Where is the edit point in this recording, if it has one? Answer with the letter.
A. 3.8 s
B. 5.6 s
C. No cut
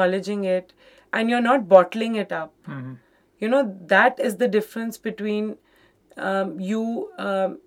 C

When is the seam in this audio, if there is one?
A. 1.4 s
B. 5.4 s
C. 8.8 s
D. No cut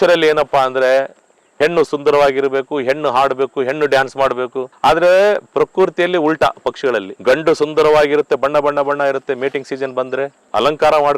A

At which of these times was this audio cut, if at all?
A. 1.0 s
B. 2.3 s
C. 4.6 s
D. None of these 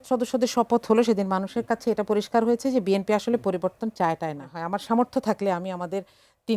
C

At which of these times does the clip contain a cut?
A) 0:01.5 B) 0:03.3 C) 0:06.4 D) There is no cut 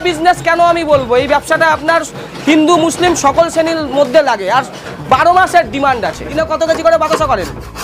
C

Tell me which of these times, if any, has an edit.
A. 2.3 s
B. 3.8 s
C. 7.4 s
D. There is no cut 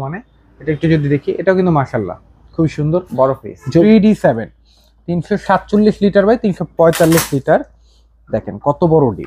B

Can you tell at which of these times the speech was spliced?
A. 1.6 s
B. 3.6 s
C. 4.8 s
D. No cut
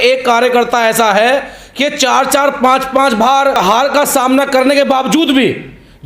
B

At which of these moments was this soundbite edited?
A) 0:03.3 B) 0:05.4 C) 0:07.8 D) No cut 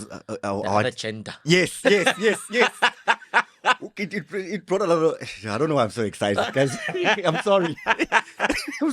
D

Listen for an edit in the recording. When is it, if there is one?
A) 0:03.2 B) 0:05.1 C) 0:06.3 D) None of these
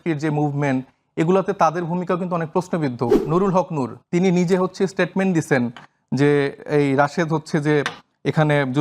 A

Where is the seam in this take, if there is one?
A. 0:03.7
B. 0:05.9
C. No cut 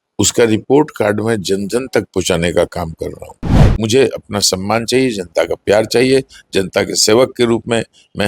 A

